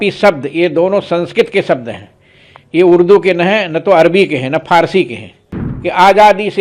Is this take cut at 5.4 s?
yes; 1 cut; at 5.4 s

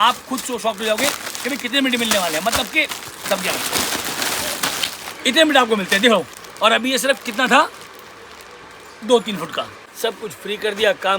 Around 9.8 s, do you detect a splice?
yes; 3 cuts; at 3.3 s, 6.3 s, 9.8 s

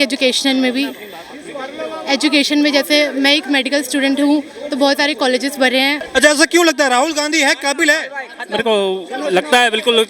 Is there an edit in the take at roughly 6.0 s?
yes; 1 cut; at 6.0 s

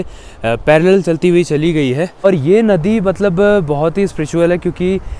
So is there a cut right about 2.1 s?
yes; 1 cut; at 2.1 s

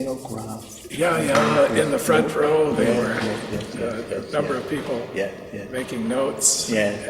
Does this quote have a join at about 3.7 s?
yes; 1 cut; at 3.7 s

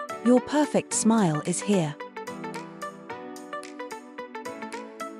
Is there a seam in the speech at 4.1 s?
no; 1 cut; at 1.9 s

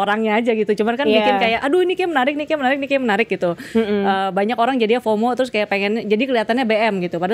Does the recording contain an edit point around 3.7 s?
no; 0 cuts

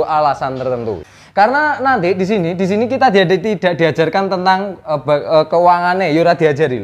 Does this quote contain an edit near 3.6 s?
no; 1 cut; at 1.0 s

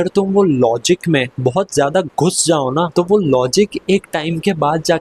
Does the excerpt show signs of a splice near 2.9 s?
yes; 2 cuts; at 1.3 s, 2.9 s

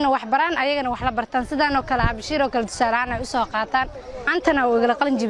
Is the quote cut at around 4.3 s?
yes; 1 cut; at 4.3 s

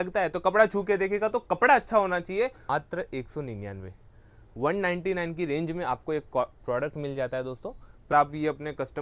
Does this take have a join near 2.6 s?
yes; 2 cuts; at 2.6 s, 8.1 s

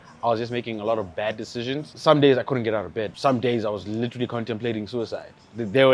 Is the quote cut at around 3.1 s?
yes; 2 cuts; at 1.9 s, 3.1 s

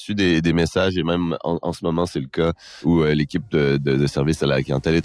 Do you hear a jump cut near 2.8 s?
yes; 1 cut; at 2.8 s

